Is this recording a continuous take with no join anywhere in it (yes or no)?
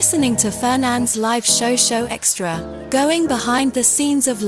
yes